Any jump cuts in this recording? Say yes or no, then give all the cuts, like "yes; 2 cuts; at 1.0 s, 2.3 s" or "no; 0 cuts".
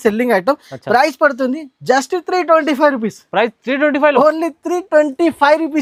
no; 0 cuts